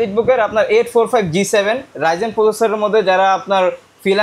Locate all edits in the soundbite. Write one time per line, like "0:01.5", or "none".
none